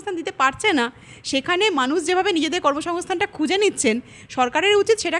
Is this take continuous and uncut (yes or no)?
yes